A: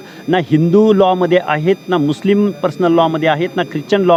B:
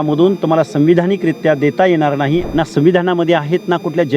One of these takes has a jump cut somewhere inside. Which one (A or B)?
B